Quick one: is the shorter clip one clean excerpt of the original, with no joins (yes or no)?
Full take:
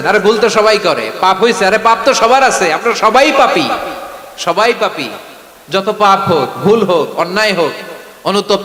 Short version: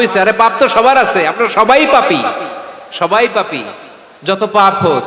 yes